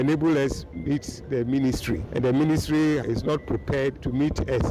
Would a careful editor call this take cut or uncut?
cut